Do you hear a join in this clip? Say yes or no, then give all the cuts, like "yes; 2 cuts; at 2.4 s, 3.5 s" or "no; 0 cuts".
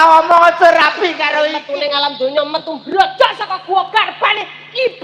yes; 1 cut; at 1.6 s